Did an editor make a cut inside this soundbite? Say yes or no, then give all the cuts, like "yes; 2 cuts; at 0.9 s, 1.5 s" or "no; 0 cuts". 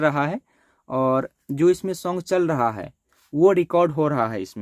no; 0 cuts